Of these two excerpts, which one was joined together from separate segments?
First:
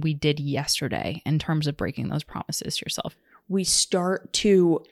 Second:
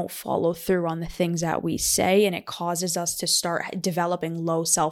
first; 1 cut; at 3.1 s

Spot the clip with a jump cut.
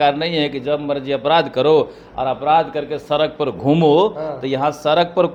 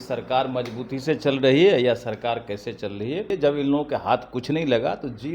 second; 1 cut; at 3.3 s

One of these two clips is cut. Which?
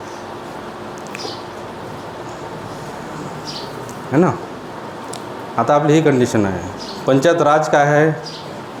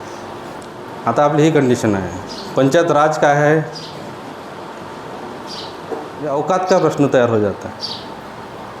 second; 2 cuts; at 1.2 s, 6.3 s

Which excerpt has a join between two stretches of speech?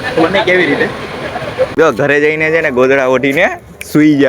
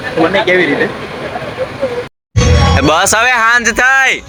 first; 1 cut; at 1.7 s

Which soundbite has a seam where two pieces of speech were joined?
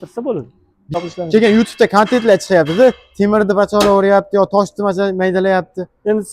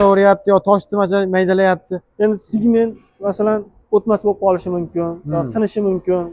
first; 1 cut; at 1.0 s

